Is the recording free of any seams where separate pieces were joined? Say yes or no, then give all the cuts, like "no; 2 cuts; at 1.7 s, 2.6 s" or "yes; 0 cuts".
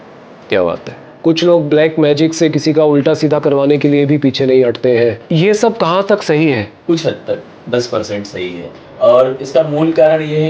no; 3 cuts; at 1.0 s, 5.2 s, 8.8 s